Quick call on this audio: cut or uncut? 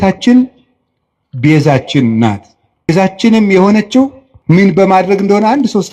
cut